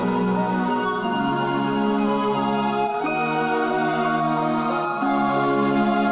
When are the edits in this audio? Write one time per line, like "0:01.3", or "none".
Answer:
none